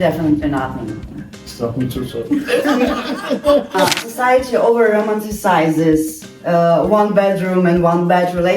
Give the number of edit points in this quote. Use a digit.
2